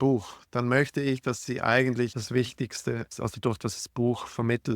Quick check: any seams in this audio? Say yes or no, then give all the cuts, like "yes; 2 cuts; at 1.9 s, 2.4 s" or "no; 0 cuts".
yes; 2 cuts; at 2.2 s, 3.1 s